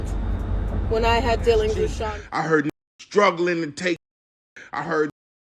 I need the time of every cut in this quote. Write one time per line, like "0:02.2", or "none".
0:02.1